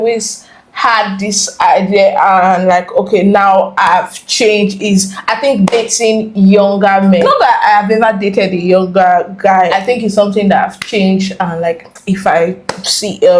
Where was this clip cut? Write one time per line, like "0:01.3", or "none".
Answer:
none